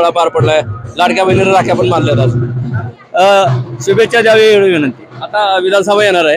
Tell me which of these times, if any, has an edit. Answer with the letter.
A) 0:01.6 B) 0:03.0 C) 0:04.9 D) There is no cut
B